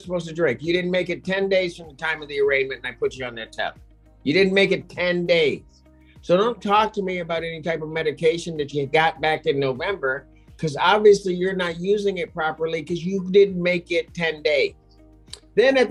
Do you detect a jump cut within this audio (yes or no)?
no